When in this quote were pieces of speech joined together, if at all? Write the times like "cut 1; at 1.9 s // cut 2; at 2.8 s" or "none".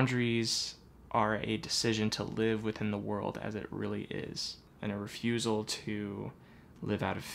cut 1; at 0.9 s // cut 2; at 4.7 s